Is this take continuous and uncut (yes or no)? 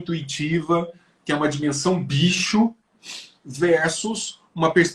yes